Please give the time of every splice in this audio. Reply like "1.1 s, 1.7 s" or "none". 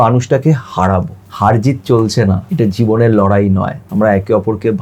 1.2 s, 2.5 s, 3.8 s